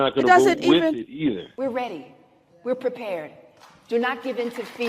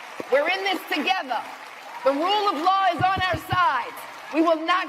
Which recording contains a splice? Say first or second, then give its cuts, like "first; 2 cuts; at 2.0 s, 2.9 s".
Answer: first; 1 cut; at 1.5 s